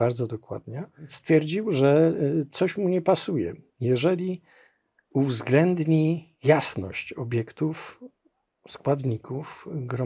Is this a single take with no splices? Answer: no; 2 cuts; at 1.1 s, 6.3 s

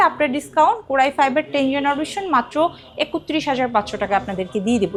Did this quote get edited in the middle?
no; 0 cuts

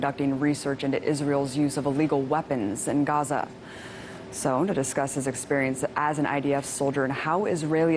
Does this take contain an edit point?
yes; 1 cut; at 5.1 s

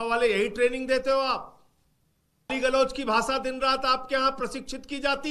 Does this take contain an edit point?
yes; 1 cut; at 2.5 s

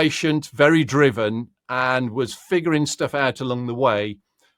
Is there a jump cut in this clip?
no; 0 cuts

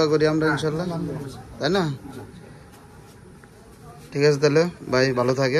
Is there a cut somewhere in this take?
no; 0 cuts

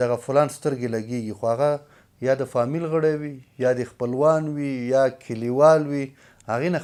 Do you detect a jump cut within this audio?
no; 0 cuts

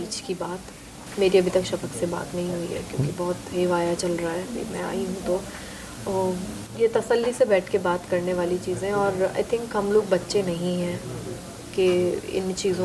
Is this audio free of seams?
yes; 0 cuts

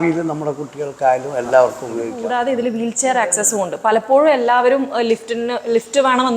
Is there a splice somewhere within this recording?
yes; 1 cut; at 2.1 s

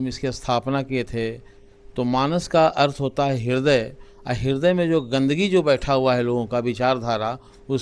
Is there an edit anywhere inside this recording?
no; 0 cuts

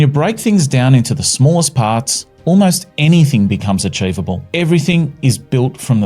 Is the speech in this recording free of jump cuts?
no; 1 cut; at 4.4 s

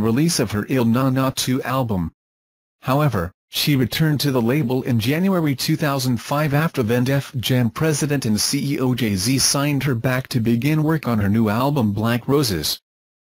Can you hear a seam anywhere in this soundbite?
yes; 1 cut; at 11.4 s

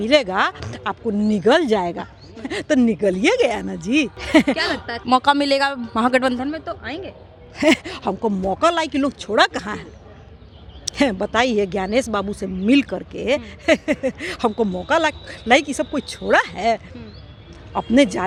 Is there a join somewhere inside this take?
no; 0 cuts

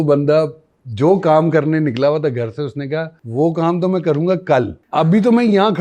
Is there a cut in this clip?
yes; 2 cuts; at 3.2 s, 4.8 s

